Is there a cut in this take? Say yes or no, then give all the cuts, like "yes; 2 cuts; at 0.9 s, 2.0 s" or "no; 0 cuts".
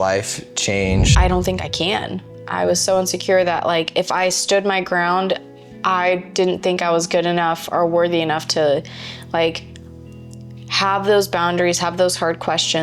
yes; 1 cut; at 1.1 s